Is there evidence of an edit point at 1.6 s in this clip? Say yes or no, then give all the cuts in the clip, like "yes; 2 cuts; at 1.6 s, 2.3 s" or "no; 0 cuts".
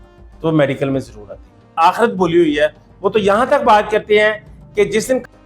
yes; 1 cut; at 1.6 s